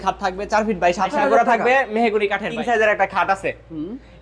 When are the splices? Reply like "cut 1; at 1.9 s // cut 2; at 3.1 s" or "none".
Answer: cut 1; at 0.8 s // cut 2; at 2.5 s